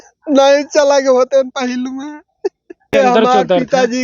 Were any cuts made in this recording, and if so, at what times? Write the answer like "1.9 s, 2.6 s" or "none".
2.9 s